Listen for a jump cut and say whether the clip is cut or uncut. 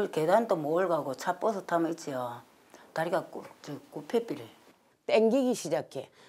cut